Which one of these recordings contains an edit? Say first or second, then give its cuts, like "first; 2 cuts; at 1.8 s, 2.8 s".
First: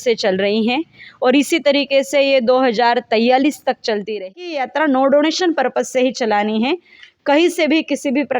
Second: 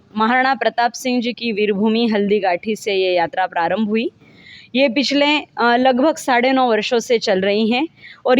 first; 1 cut; at 4.3 s